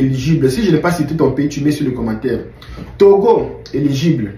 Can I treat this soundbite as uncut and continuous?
yes; 0 cuts

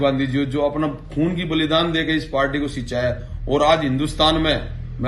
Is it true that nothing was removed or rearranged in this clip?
yes; 0 cuts

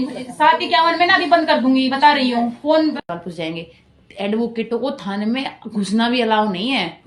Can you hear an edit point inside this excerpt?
yes; 1 cut; at 3.1 s

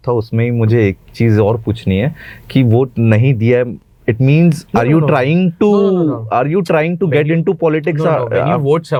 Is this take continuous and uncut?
yes; 0 cuts

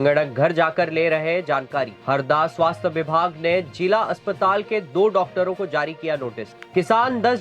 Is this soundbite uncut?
no; 2 cuts; at 2.0 s, 6.5 s

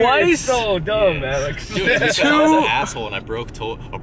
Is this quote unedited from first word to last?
yes; 0 cuts

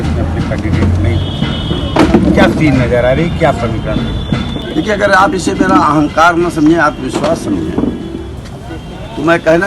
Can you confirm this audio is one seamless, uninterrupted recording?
no; 1 cut; at 4.6 s

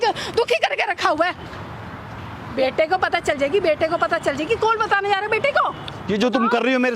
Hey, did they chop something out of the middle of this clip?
no; 0 cuts

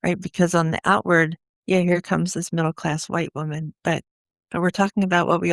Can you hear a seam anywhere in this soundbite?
no; 0 cuts

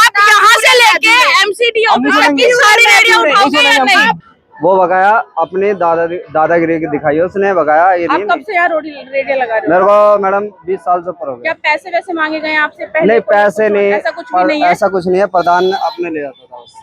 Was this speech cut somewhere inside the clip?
yes; 1 cut; at 4.2 s

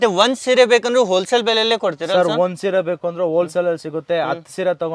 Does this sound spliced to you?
no; 0 cuts

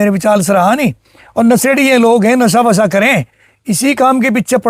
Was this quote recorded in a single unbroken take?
yes; 0 cuts

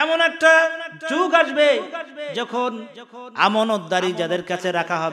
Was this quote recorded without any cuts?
yes; 0 cuts

